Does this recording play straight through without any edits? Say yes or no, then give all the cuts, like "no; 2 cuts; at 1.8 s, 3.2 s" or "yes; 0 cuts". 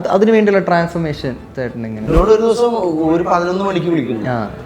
no; 1 cut; at 2.0 s